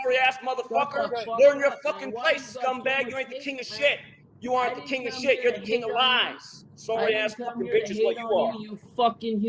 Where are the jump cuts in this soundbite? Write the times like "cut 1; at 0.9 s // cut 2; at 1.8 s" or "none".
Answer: none